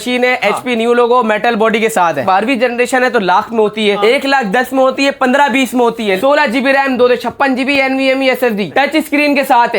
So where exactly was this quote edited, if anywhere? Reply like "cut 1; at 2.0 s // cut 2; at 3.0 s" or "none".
cut 1; at 2.2 s // cut 2; at 6.2 s // cut 3; at 8.7 s